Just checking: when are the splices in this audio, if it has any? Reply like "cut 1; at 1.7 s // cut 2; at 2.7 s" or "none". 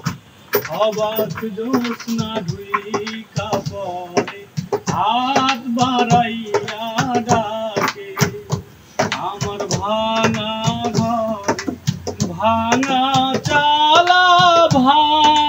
none

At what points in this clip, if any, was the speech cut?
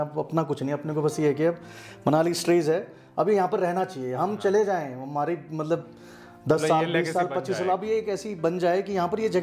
none

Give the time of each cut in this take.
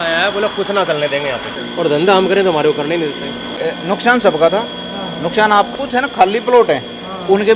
cut 1; at 1.5 s // cut 2; at 3.6 s // cut 3; at 5.7 s

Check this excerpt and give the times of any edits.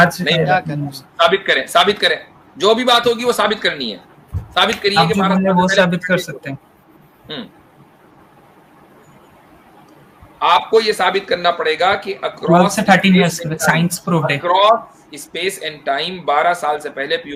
none

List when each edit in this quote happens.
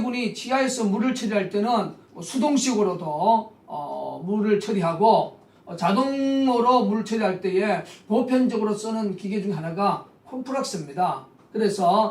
cut 1; at 1.5 s

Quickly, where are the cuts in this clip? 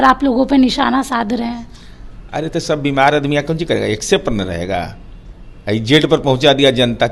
none

